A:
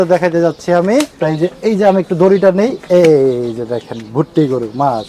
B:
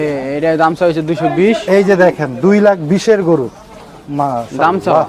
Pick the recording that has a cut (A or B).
A